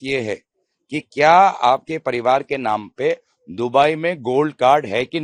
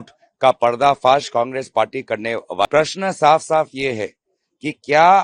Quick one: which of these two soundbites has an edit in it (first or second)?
second